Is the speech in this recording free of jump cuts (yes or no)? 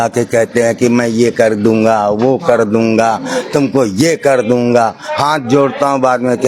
yes